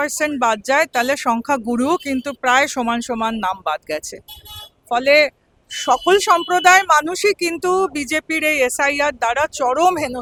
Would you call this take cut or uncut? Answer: uncut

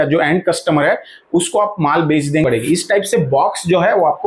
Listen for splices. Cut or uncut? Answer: cut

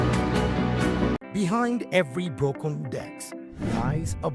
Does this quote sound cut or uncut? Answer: cut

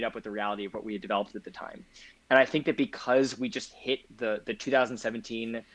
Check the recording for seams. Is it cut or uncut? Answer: uncut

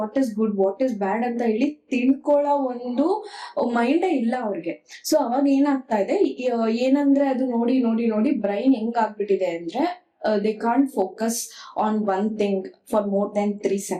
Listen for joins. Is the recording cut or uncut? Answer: uncut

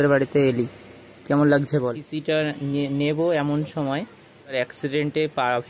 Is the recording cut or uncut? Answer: cut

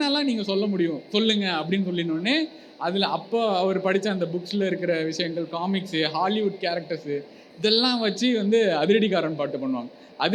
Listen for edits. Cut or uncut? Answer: uncut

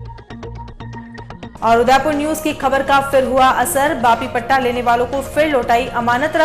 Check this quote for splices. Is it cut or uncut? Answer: cut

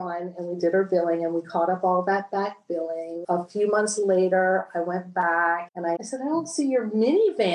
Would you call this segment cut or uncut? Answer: cut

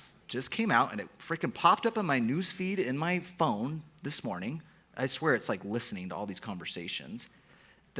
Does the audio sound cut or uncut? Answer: uncut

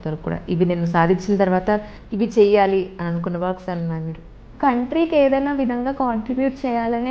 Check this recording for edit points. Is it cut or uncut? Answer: cut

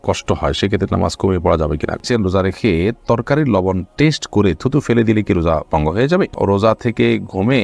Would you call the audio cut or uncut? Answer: cut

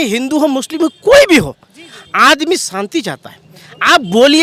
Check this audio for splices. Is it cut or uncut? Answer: uncut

